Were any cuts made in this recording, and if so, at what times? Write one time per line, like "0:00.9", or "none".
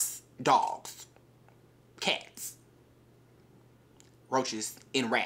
none

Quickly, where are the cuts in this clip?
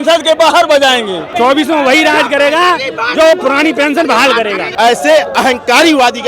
0:01.3
0:04.6

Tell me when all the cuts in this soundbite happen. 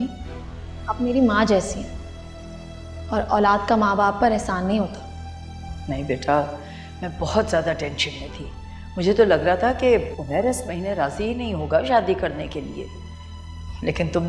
none

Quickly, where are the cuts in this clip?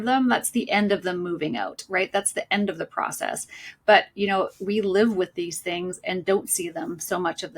none

